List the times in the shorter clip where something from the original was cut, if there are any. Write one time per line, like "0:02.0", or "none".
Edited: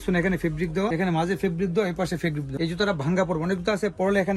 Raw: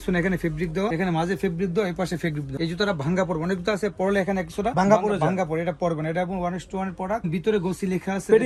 none